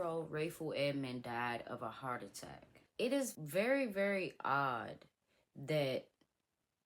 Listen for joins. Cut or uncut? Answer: cut